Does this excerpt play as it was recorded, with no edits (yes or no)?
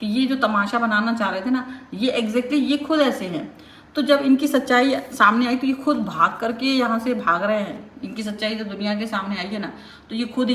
yes